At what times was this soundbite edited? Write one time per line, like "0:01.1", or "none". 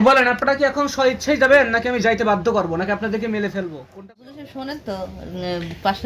0:03.9

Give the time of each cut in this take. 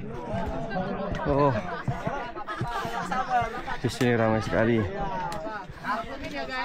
none

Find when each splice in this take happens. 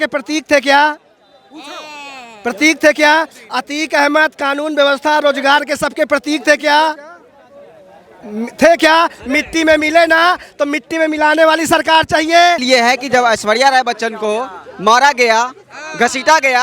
0:12.6

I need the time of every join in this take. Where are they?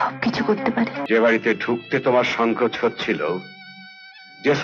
0:01.0

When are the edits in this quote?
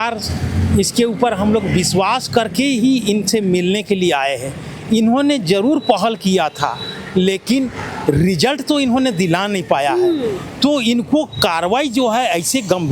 none

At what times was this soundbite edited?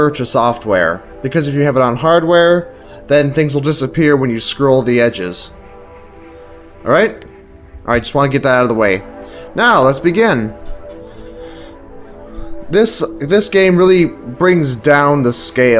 0:12.8

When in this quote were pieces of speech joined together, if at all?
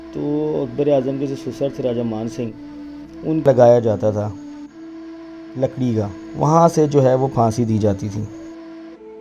0:03.4

